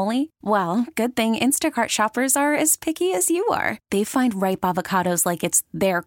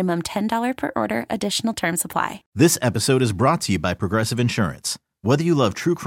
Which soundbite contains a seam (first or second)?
second